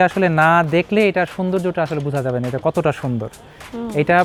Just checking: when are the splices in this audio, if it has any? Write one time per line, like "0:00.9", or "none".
none

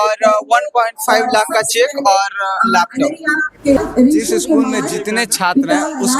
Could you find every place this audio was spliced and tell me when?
0:03.8

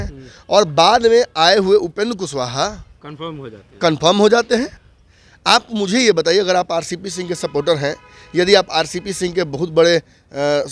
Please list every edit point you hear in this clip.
none

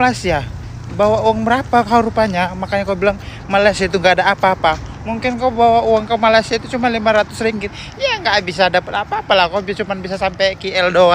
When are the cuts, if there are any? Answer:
none

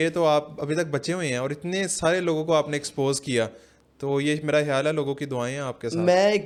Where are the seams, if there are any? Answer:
none

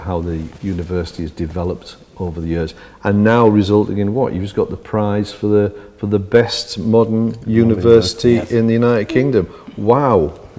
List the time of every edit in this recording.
none

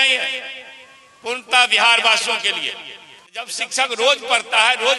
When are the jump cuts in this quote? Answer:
0:03.6

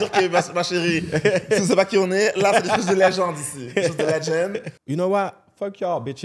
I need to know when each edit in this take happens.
0:04.7

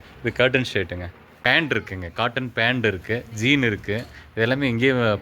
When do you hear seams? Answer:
0:01.4

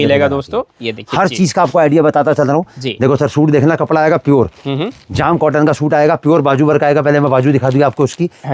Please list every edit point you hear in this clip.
none

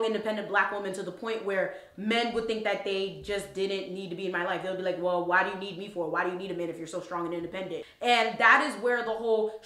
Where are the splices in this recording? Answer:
none

